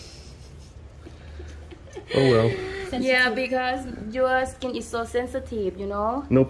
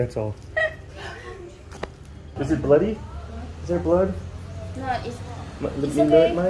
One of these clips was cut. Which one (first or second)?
second